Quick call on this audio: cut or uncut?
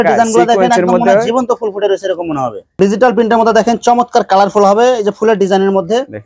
cut